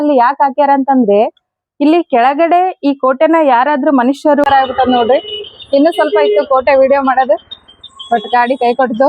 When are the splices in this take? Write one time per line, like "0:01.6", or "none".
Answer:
0:04.4

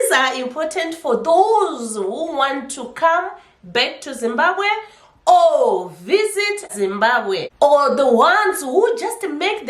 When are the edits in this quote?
0:06.7
0:07.5

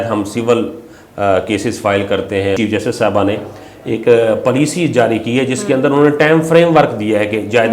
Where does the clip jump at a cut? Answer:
0:02.6

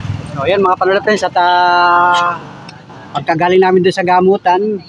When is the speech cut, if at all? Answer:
none

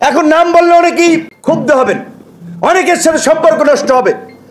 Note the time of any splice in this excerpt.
0:01.3

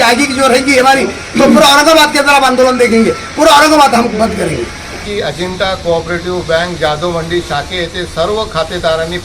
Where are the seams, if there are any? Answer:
0:05.0

